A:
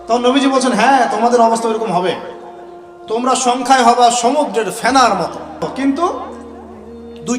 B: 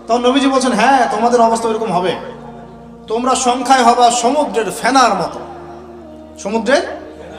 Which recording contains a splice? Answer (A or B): A